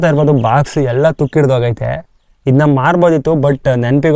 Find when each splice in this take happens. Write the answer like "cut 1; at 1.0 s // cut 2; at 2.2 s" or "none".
none